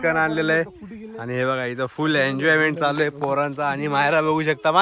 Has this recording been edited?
no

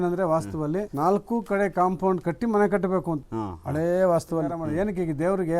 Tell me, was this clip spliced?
yes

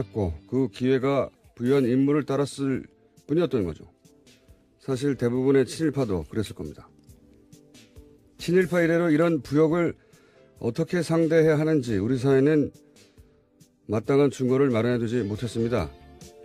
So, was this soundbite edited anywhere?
yes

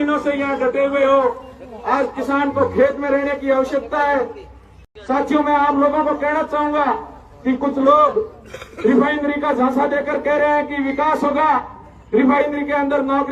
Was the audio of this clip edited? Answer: yes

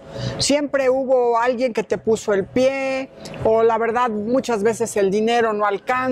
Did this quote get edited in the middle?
no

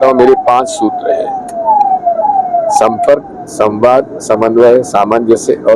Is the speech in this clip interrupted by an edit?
no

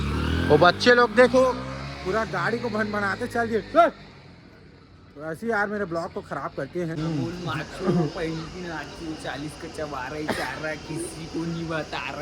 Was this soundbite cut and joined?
yes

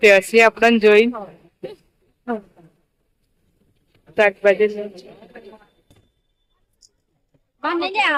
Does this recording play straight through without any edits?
yes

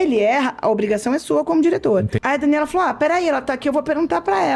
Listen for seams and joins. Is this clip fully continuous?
no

